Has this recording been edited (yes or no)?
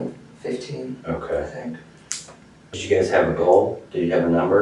yes